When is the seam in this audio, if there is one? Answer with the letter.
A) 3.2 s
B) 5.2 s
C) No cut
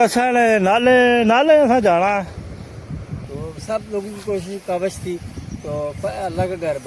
A